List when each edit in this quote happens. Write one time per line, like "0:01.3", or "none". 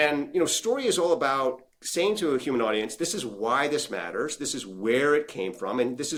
none